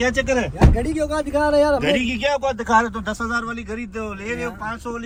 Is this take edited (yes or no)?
no